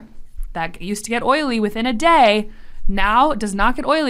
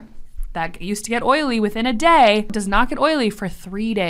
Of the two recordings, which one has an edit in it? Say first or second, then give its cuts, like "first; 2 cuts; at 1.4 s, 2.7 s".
second; 1 cut; at 2.5 s